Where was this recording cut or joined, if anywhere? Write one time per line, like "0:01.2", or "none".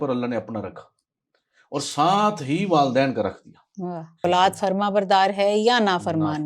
0:04.2

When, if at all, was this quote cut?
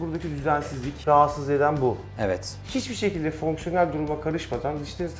0:01.0
0:02.6

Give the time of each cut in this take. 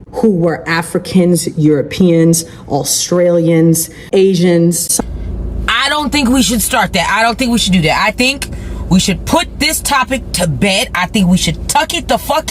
0:04.9

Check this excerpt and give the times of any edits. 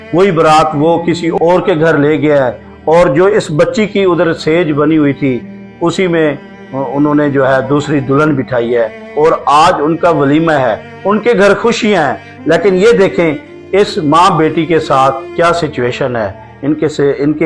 none

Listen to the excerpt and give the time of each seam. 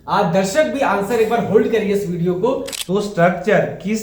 0:02.7

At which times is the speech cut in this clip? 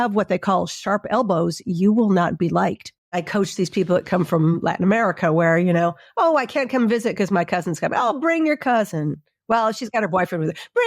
0:03.2

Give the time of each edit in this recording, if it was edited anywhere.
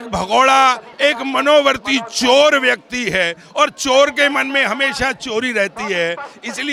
none

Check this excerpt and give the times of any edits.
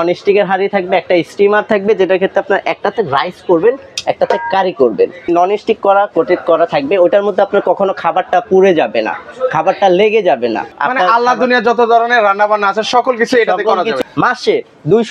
0:05.3
0:10.7
0:14.0

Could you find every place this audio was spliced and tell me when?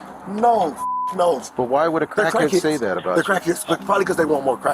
0:01.5

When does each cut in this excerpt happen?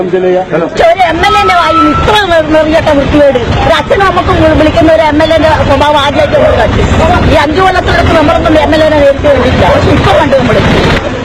0:03.6

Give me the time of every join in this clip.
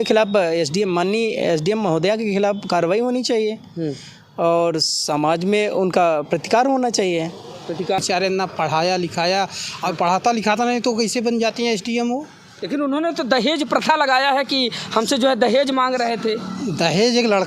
0:08.0

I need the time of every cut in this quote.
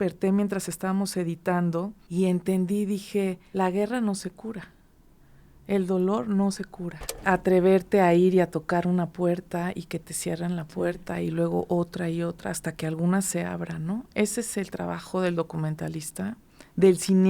0:02.0
0:03.4
0:07.2

